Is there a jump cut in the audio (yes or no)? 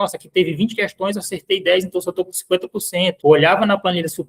yes